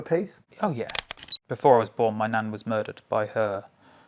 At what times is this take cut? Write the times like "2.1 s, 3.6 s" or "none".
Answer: 1.0 s